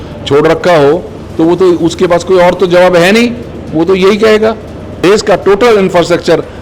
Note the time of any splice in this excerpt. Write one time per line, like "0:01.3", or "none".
0:05.0